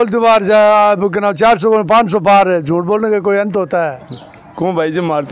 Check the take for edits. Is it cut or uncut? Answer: cut